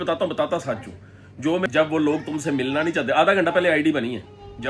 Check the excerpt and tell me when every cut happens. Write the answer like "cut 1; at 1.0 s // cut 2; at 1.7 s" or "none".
cut 1; at 1.7 s